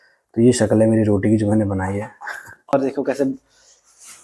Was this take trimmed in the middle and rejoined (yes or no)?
yes